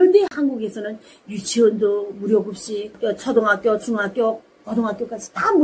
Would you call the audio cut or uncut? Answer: uncut